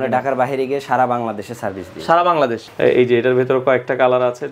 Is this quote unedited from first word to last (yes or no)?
no